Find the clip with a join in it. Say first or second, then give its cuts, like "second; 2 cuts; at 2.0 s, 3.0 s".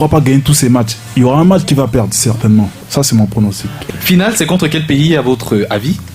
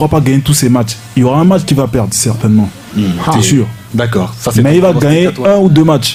first; 2 cuts; at 2.8 s, 3.8 s